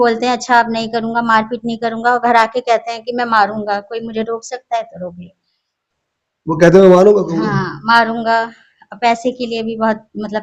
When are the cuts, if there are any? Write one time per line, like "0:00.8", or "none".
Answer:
none